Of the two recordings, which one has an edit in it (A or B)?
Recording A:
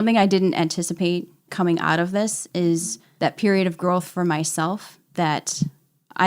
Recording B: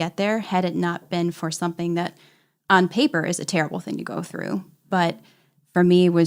A